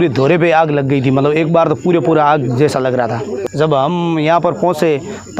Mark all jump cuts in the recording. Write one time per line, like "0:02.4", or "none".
0:03.5